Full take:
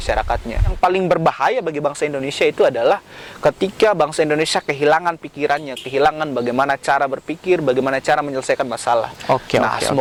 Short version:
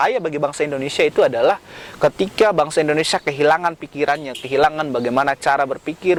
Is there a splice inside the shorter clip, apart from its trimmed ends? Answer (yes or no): no